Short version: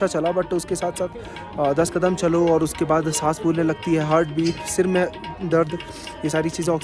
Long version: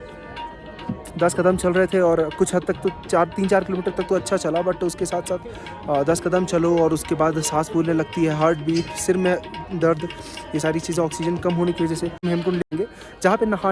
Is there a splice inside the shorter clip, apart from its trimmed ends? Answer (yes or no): no